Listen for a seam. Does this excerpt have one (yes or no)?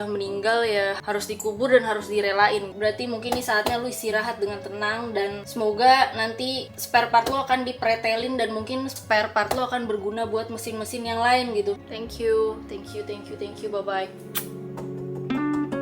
yes